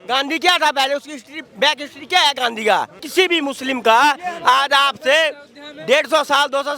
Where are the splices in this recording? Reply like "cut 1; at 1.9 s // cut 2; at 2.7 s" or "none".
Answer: cut 1; at 3.0 s